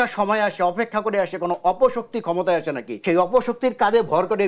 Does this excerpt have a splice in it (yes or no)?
yes